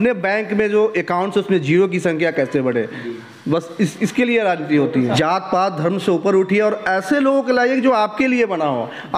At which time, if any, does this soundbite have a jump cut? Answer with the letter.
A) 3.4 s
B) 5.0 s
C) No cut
B